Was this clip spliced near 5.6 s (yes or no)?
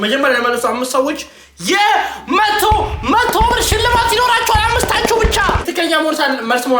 yes